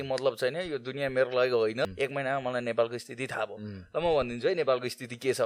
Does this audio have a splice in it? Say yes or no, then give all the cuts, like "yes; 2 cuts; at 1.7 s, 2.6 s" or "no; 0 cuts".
yes; 1 cut; at 1.8 s